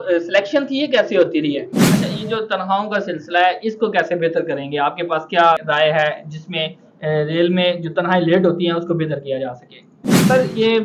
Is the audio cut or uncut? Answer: cut